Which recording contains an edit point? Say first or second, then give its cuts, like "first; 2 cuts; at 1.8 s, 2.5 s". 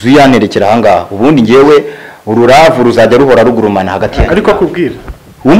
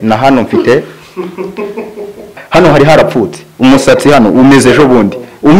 second; 1 cut; at 2.4 s